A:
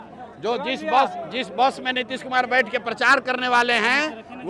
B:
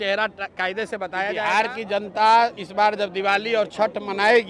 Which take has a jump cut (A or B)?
B